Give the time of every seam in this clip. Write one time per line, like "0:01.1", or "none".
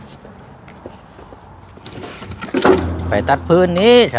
0:02.9

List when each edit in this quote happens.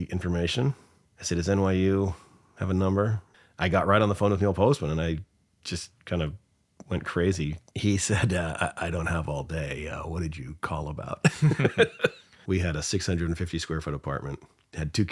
0:03.3
0:07.6
0:12.3

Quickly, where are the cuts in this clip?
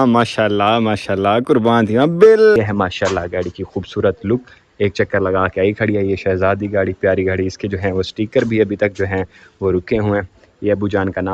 0:02.6

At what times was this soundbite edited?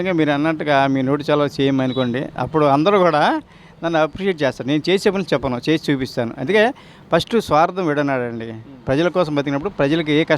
none

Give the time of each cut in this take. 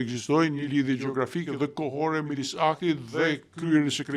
none

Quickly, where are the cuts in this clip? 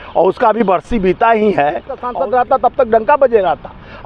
0:02.1

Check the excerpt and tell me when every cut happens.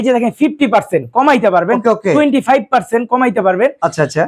none

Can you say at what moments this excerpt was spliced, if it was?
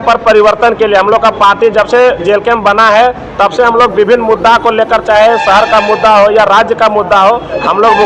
none

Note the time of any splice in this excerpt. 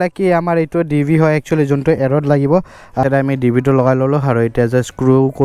0:03.0

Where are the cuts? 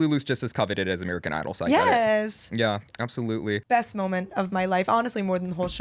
0:03.6

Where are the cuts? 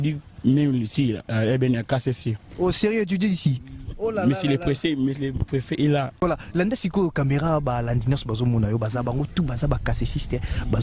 0:06.2

